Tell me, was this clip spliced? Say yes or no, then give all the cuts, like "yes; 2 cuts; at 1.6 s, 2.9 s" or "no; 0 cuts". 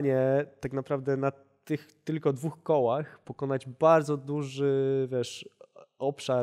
no; 0 cuts